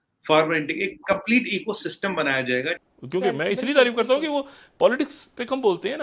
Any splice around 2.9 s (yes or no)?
yes